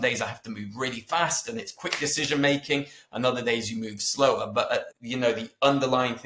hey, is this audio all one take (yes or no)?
no